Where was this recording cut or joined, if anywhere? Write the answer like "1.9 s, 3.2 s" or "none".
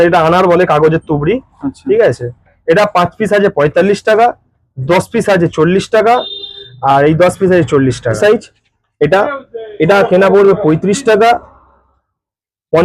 8.2 s

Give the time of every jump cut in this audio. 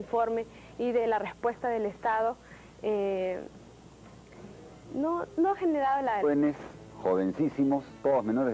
none

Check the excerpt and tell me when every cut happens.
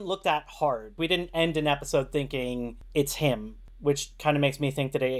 1.0 s

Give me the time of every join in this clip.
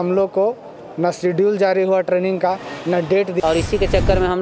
3.3 s

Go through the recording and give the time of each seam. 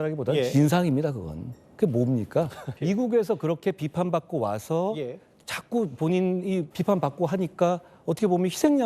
2.7 s, 6.7 s

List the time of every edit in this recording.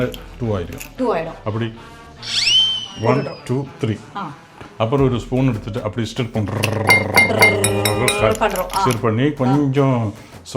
none

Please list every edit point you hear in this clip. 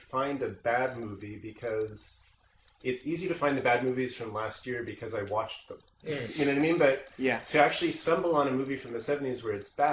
3.6 s

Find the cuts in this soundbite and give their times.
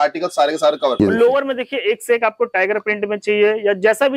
1.0 s

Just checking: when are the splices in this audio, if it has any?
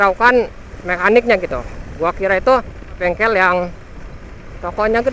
3.0 s

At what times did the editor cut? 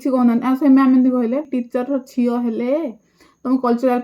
1.5 s

